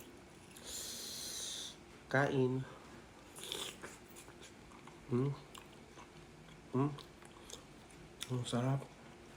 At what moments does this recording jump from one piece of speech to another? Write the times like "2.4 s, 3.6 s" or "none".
none